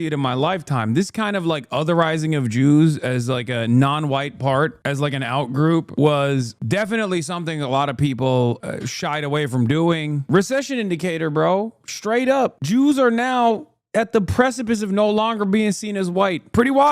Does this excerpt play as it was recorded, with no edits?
no; 1 cut; at 10.2 s

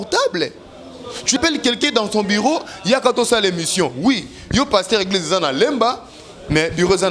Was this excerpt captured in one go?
no; 1 cut; at 1.4 s

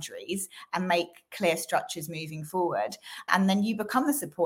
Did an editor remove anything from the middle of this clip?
yes; 1 cut; at 3.3 s

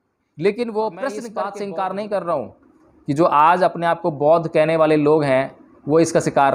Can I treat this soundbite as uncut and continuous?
no; 1 cut; at 1.3 s

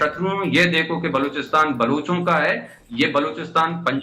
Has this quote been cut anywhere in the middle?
no; 0 cuts

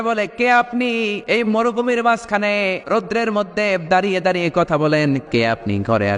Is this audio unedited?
no; 3 cuts; at 1.2 s, 2.8 s, 5.2 s

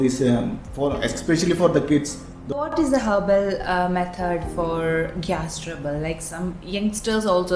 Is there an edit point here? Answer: yes; 1 cut; at 2.7 s

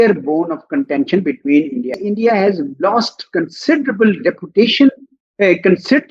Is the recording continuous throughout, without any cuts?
no; 1 cut; at 1.9 s

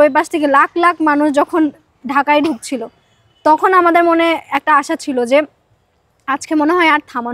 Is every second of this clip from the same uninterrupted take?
yes; 0 cuts

